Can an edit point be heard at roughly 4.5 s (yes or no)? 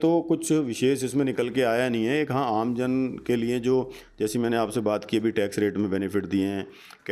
no